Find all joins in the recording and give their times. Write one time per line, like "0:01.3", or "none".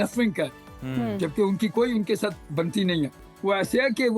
0:03.2